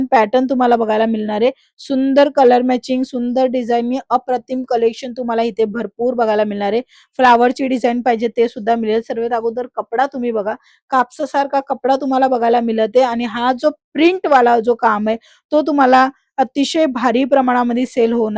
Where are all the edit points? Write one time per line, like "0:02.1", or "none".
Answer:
none